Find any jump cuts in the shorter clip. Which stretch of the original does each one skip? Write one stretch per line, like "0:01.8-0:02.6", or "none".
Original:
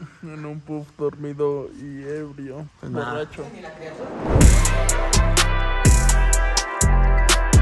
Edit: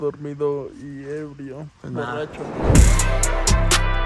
0:03.5-0:04.1